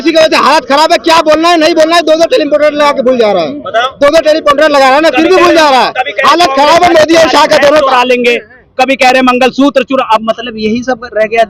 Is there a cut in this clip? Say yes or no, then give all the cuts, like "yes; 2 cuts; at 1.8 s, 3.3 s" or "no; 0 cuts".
no; 0 cuts